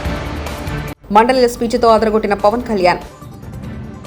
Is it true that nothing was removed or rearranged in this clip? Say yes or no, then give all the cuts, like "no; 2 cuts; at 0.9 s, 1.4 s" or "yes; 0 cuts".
no; 1 cut; at 0.9 s